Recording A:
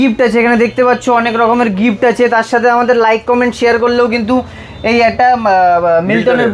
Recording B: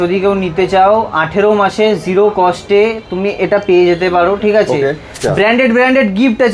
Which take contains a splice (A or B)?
B